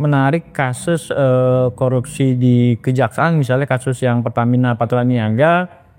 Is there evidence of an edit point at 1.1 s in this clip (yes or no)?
no